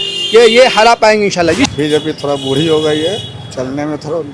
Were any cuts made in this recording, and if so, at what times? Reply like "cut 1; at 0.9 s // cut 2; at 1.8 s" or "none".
cut 1; at 1.7 s